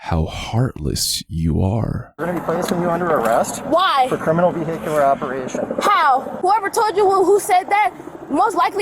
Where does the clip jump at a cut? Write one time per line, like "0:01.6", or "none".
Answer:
0:02.2
0:06.3